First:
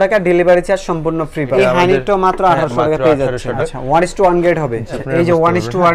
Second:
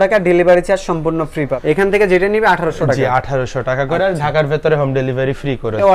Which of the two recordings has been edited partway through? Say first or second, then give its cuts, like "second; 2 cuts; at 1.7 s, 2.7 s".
first; 3 cuts; at 1.5 s, 3.6 s, 5.0 s